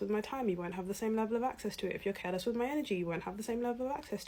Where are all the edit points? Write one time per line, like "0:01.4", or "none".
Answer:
none